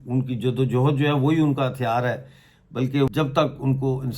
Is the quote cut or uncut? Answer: cut